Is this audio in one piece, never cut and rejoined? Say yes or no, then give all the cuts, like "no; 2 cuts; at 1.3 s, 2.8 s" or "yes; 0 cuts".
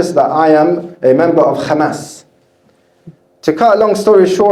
yes; 0 cuts